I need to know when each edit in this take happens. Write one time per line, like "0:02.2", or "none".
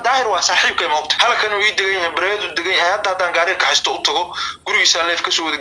0:01.1